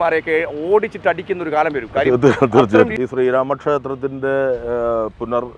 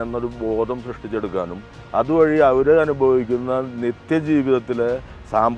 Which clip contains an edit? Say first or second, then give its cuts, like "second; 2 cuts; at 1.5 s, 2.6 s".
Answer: first; 1 cut; at 2.9 s